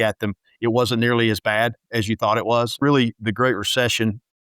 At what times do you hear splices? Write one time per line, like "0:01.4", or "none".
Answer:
0:02.7

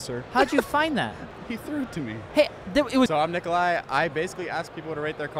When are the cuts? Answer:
0:01.7
0:03.1

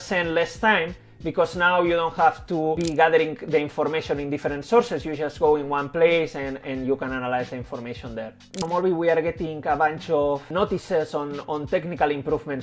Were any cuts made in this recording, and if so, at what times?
0:02.8
0:08.5
0:10.4

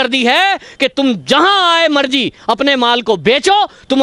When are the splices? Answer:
none

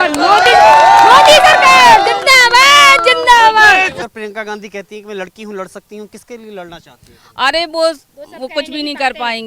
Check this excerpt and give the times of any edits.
0:04.0

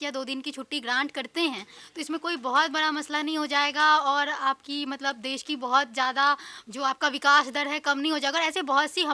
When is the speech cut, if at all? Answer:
none

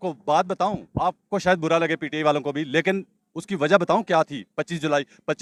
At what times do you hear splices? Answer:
none

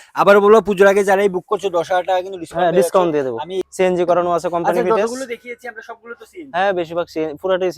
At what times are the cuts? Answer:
0:03.6

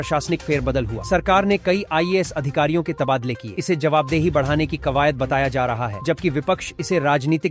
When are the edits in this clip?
none

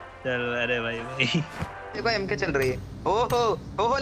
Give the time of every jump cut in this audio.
0:02.0

